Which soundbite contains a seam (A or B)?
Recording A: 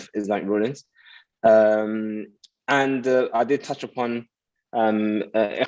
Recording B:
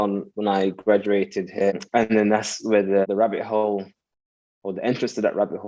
B